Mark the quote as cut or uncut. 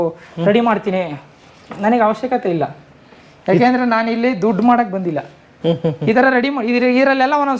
uncut